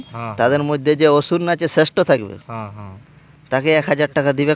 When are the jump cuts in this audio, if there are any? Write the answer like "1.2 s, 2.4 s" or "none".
none